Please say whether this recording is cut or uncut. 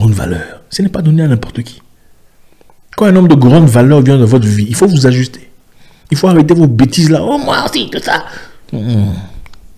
uncut